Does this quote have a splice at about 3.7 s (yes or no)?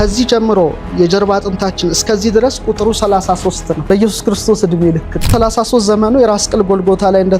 yes